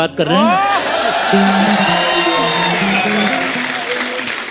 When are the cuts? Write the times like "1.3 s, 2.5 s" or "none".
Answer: none